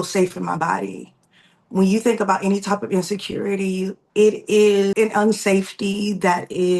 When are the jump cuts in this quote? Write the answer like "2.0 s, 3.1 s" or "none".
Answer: 4.0 s, 4.9 s